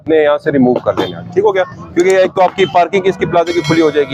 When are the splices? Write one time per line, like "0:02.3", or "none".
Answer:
none